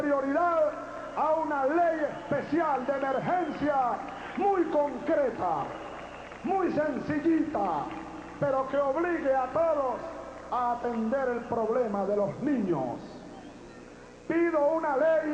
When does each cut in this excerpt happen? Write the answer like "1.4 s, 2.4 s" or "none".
8.9 s